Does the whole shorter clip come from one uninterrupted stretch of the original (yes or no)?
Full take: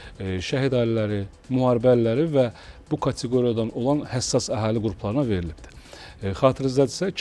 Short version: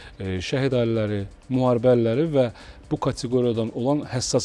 yes